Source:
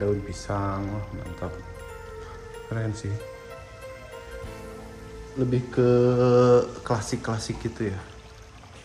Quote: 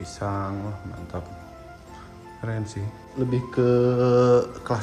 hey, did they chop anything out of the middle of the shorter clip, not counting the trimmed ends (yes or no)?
yes